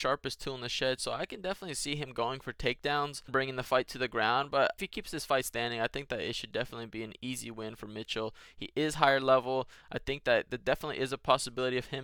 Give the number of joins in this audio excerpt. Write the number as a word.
zero